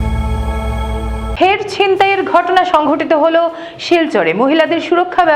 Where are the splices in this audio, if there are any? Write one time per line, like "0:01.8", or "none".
0:01.3